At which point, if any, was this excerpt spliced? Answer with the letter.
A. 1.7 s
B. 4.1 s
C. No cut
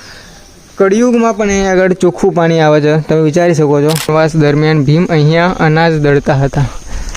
B